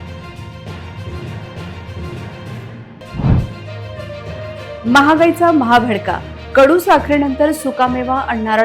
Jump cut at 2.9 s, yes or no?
yes